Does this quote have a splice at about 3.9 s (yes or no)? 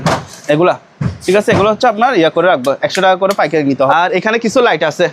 yes